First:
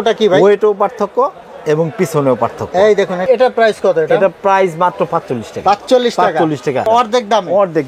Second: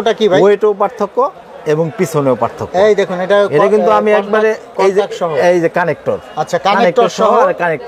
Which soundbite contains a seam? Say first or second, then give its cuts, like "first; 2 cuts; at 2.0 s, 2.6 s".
first; 2 cuts; at 3.3 s, 6.9 s